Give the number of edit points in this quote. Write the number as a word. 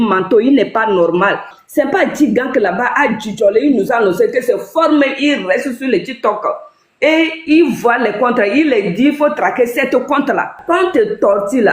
two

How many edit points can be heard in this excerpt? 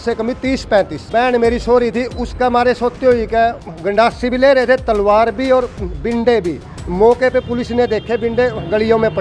two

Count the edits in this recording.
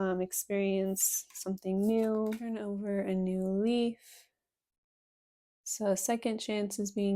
one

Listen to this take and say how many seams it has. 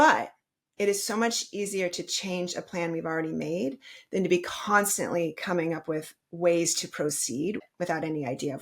one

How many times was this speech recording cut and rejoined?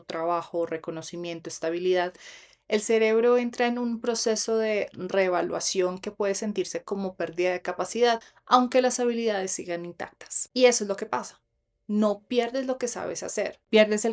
one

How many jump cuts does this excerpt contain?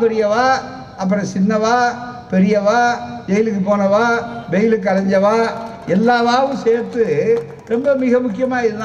zero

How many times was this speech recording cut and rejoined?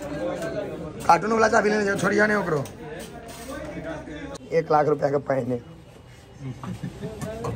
one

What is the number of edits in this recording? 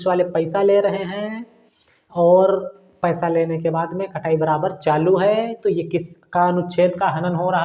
zero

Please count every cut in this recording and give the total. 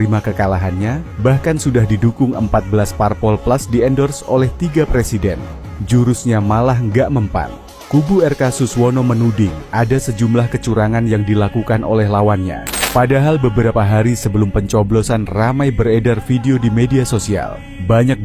zero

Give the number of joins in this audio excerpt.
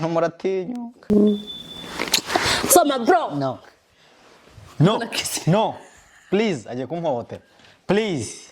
one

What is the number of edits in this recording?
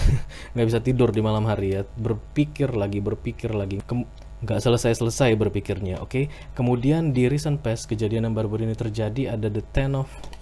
zero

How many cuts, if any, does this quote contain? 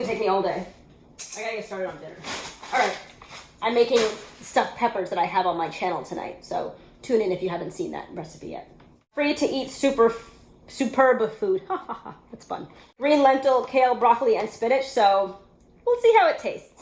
two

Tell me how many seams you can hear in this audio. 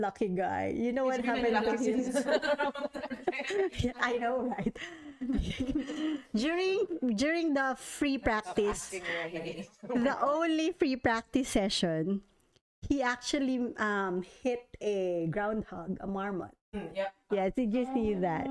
zero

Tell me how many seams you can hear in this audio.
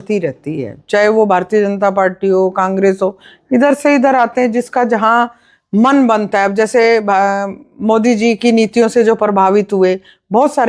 zero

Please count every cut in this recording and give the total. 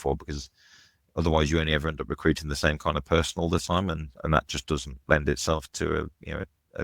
one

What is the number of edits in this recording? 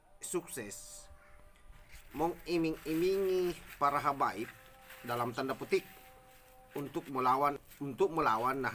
one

